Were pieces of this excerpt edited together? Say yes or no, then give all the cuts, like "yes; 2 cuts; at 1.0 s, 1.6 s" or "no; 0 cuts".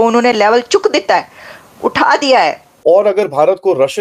yes; 1 cut; at 2.7 s